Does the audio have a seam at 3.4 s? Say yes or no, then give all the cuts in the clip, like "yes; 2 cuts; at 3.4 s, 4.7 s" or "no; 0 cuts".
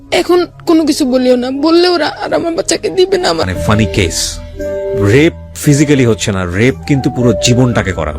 yes; 1 cut; at 3.4 s